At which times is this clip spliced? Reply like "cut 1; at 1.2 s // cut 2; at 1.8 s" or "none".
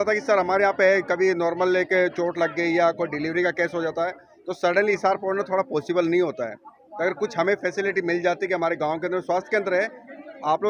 none